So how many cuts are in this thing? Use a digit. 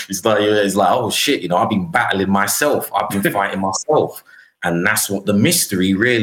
0